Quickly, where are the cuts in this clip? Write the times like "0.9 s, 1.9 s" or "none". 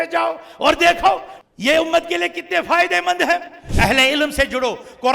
1.3 s, 3.7 s